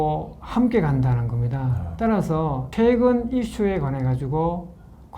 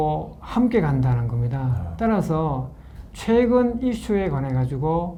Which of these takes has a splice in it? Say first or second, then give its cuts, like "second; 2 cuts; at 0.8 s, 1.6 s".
first; 1 cut; at 2.6 s